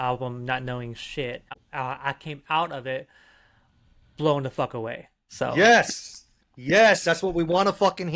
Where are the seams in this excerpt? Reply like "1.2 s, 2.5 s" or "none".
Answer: 1.6 s

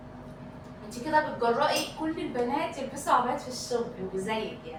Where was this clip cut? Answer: none

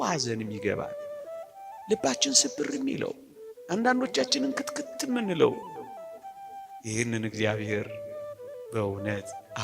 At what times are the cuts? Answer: none

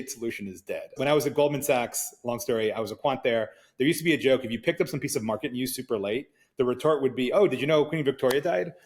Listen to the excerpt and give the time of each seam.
0.9 s

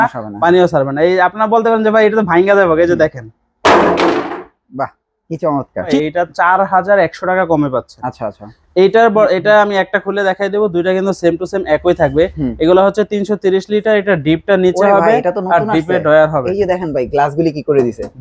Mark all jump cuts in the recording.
5.9 s

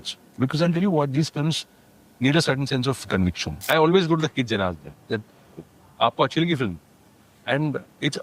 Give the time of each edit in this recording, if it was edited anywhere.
3.5 s

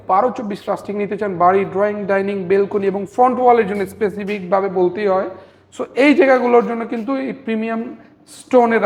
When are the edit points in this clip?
none

